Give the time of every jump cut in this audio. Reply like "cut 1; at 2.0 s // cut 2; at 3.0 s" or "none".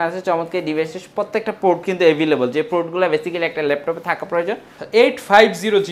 cut 1; at 4.7 s